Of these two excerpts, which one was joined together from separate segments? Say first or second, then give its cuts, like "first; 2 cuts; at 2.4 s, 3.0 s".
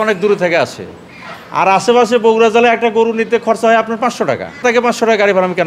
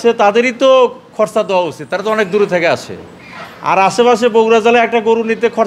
first; 1 cut; at 4.6 s